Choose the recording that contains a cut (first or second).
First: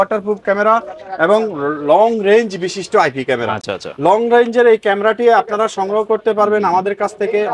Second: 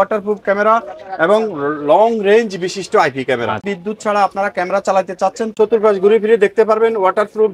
second